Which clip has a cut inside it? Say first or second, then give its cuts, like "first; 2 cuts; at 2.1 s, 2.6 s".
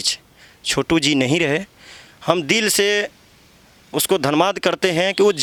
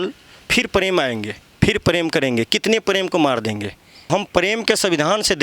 second; 1 cut; at 4.1 s